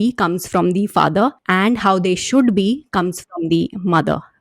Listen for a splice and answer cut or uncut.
cut